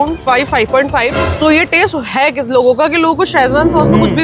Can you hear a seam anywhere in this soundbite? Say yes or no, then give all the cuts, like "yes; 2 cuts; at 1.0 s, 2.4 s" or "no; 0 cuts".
yes; 1 cut; at 1.2 s